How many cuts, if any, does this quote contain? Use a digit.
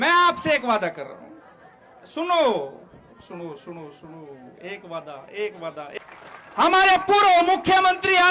1